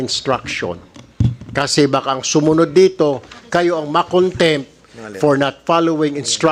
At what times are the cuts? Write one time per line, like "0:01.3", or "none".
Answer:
none